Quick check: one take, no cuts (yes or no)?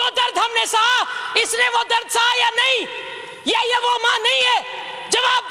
yes